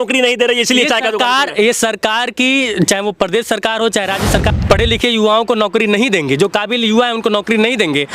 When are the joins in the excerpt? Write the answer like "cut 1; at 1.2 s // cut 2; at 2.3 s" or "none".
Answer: cut 1; at 4.5 s